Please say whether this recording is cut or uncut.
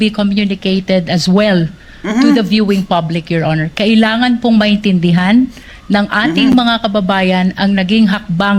uncut